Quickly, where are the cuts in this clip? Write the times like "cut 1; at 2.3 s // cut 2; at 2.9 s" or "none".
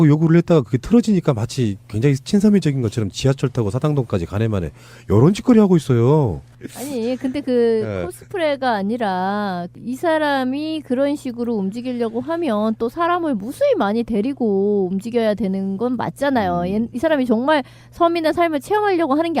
cut 1; at 16.9 s